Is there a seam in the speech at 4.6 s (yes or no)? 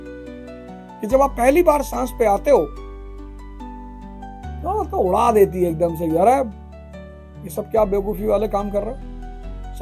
yes